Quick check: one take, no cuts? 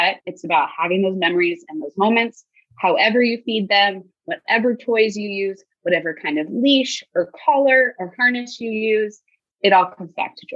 no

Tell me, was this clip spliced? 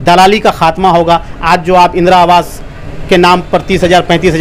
no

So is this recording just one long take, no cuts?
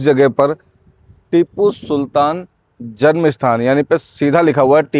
yes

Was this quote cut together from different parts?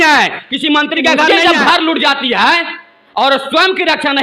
yes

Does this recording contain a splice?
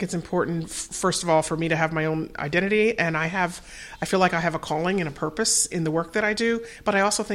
no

